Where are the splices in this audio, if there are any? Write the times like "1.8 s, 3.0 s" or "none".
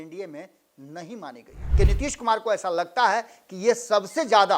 1.6 s